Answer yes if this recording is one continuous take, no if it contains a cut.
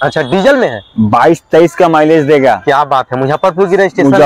yes